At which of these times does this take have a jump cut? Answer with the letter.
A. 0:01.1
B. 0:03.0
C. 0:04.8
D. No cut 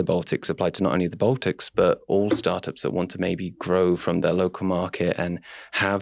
D